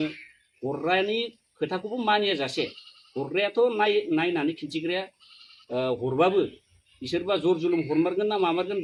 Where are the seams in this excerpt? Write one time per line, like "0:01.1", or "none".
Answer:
none

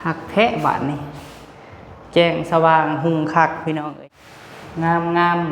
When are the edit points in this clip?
0:03.9

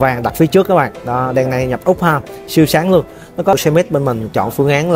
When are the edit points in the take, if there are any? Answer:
0:03.5

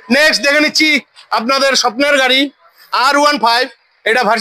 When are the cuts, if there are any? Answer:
none

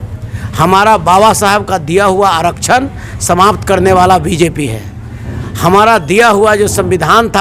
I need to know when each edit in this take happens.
none

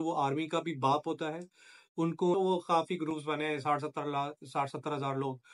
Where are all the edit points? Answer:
0:02.3

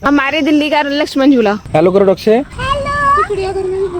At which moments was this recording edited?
0:01.6

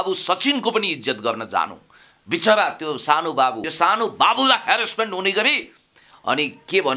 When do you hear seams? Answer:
0:03.6

